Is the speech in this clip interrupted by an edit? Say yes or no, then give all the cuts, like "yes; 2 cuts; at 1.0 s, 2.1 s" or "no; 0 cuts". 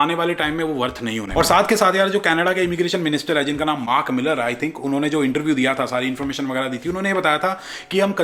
no; 0 cuts